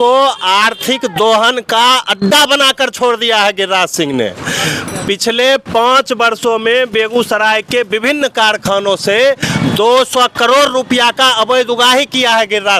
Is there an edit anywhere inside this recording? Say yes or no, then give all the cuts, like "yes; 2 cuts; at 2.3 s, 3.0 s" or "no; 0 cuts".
no; 0 cuts